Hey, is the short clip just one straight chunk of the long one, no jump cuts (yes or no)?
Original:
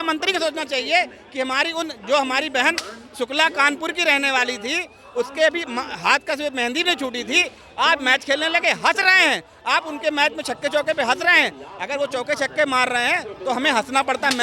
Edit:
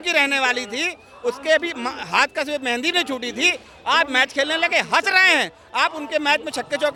yes